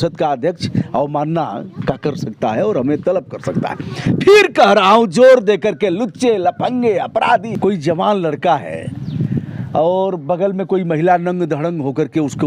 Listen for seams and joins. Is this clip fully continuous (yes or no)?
no